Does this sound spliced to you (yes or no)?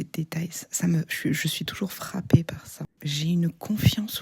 yes